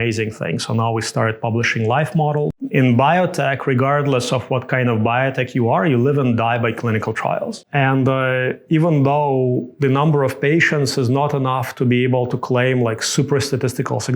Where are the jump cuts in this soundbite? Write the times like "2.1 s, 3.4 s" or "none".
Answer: 2.6 s, 7.6 s